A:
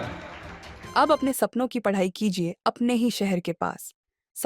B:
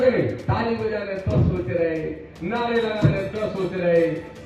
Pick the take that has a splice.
A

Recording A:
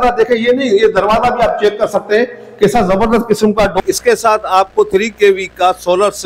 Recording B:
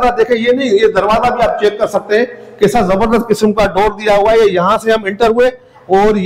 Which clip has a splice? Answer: A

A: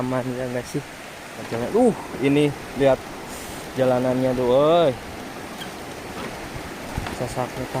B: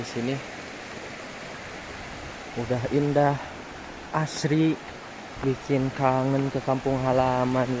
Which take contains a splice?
A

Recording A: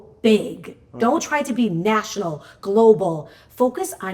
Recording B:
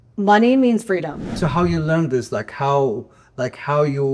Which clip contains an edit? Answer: B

